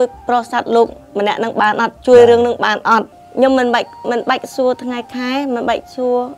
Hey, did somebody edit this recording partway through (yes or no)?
yes